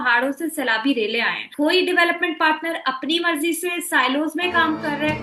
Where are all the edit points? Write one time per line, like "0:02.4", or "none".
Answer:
0:01.5